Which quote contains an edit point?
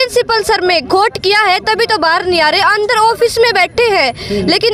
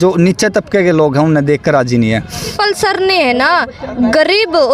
second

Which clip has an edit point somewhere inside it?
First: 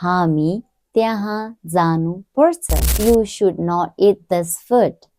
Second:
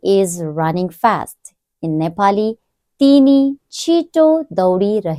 first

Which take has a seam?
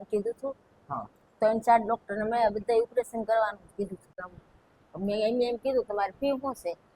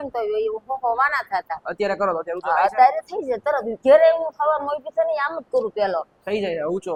first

